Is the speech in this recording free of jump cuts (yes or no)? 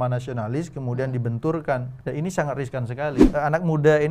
no